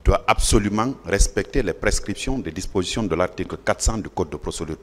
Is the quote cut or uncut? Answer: uncut